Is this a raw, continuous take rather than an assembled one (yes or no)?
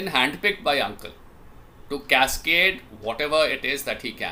yes